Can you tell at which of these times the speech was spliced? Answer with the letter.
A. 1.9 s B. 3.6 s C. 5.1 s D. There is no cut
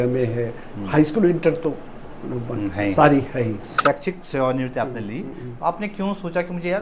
B